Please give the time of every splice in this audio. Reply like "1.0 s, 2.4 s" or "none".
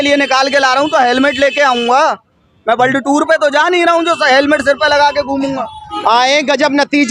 5.9 s